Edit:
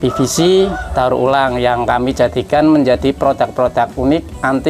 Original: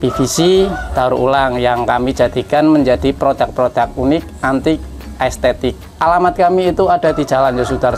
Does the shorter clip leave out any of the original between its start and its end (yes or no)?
no